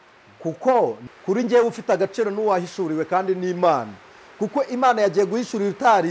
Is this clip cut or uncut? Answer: cut